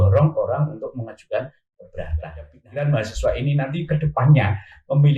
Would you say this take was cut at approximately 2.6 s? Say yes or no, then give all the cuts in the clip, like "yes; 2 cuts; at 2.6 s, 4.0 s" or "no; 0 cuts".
yes; 1 cut; at 2.6 s